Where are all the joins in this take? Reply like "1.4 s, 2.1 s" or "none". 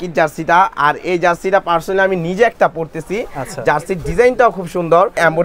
none